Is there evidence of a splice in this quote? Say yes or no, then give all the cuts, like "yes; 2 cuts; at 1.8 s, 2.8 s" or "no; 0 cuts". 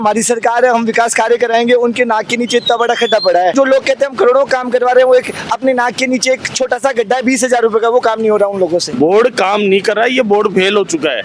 yes; 2 cuts; at 3.5 s, 8.9 s